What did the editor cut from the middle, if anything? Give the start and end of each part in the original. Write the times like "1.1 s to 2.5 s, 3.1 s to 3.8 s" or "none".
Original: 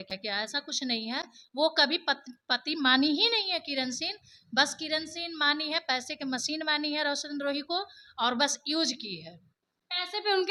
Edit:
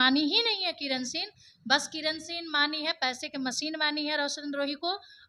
none